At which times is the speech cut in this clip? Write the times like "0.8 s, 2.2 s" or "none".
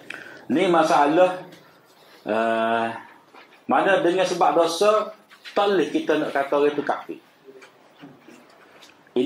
none